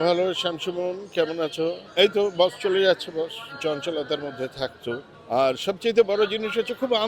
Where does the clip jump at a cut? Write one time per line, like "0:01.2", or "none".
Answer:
0:01.8
0:03.5
0:05.1

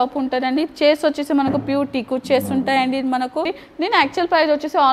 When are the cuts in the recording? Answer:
0:03.6

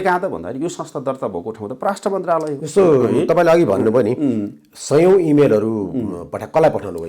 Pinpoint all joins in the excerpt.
none

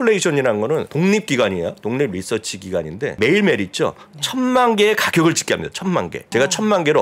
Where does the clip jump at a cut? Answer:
0:00.9
0:03.1
0:06.2

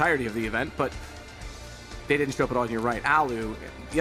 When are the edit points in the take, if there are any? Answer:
0:02.5

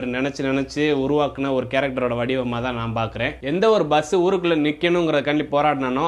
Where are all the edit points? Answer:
0:03.3

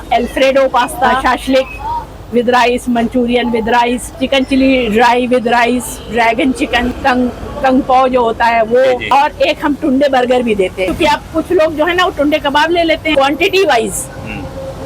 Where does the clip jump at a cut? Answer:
0:01.2
0:04.2
0:07.0
0:09.0
0:10.9
0:13.1

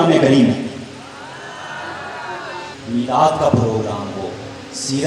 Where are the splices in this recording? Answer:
0:02.7

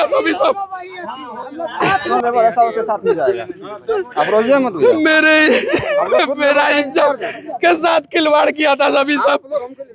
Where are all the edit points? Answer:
0:02.1

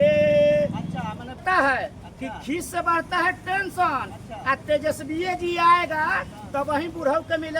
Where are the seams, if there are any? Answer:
0:01.4

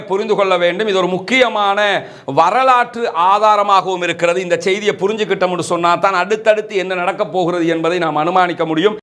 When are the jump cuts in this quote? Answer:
none

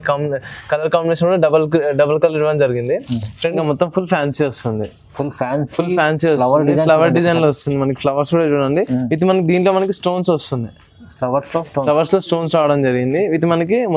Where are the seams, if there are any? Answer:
0:03.5

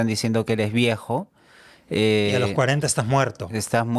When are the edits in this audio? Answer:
none

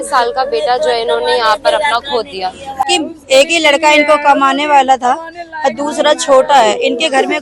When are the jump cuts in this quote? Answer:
0:02.9

